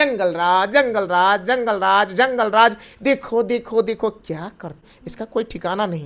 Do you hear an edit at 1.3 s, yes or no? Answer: no